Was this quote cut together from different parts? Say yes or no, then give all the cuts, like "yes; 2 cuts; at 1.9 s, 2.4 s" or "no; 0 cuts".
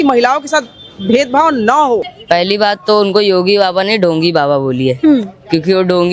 yes; 1 cut; at 2.1 s